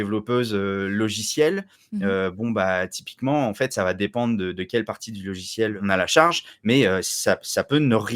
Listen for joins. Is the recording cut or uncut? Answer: cut